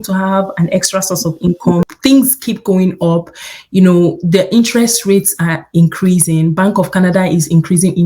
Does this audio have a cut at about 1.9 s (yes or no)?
yes